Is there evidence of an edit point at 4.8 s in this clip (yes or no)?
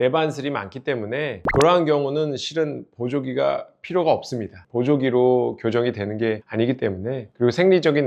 no